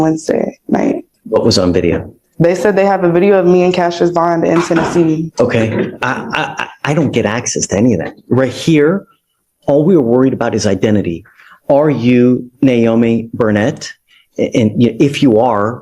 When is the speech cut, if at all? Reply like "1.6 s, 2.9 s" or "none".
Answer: 1.1 s, 5.3 s